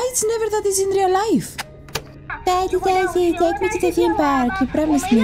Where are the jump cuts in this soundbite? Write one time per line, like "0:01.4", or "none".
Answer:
0:02.2